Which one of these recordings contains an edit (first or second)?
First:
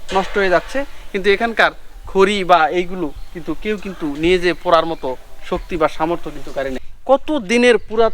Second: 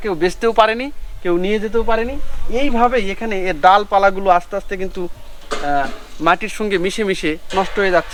first